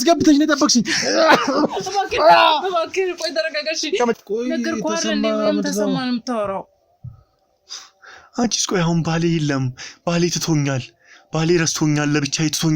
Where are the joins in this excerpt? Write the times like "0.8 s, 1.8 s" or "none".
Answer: 4.2 s

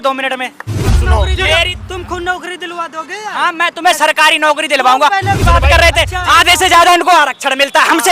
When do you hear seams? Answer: 0.9 s, 5.4 s

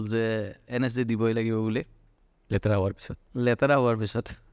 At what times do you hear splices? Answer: none

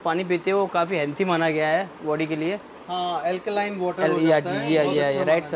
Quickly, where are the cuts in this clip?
none

